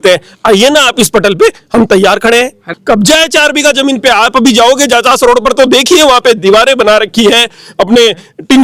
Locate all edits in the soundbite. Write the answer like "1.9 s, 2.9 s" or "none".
2.6 s